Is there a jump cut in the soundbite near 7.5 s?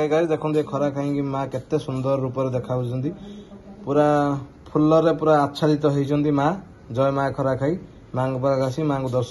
no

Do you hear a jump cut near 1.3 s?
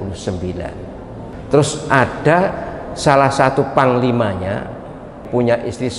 yes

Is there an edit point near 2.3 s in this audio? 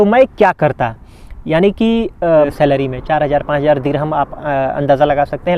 yes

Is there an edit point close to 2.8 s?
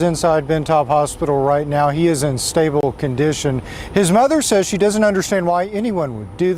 yes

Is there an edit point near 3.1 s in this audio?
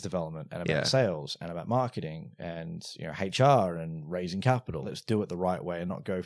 no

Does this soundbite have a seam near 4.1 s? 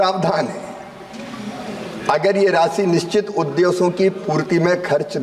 yes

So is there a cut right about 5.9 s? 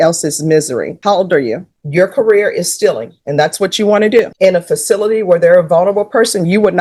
no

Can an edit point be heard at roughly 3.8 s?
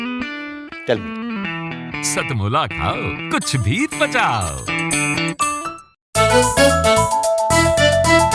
no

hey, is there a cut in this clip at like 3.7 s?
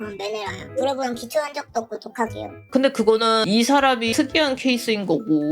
no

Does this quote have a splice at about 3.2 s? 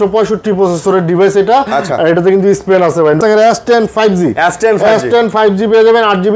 yes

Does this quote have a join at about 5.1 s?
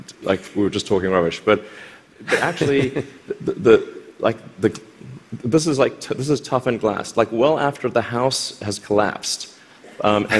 no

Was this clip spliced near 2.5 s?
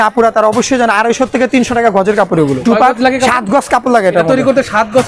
yes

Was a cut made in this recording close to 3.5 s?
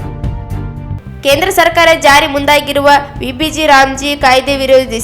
no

